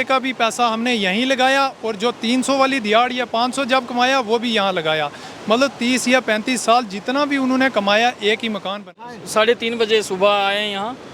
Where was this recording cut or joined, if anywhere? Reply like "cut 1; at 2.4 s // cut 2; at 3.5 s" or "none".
cut 1; at 8.9 s